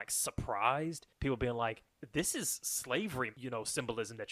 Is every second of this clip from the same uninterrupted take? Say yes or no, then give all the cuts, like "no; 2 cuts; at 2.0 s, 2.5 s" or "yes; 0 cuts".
no; 3 cuts; at 1.1 s, 1.9 s, 3.4 s